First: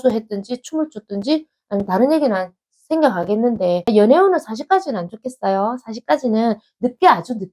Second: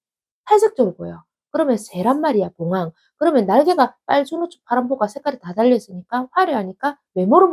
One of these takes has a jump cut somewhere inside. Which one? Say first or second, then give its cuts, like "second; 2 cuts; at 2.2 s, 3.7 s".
first; 1 cut; at 3.9 s